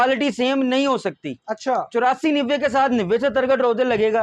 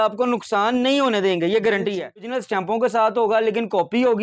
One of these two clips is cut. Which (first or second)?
second